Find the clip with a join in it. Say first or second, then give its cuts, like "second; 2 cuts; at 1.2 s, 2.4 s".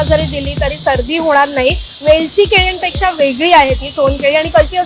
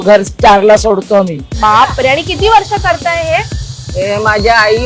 second; 1 cut; at 1.4 s